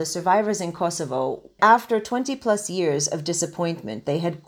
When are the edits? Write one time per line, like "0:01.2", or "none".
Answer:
0:01.6